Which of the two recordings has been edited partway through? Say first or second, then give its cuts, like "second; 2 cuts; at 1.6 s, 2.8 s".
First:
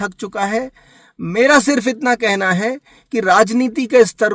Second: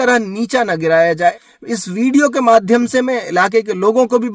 second; 1 cut; at 1.5 s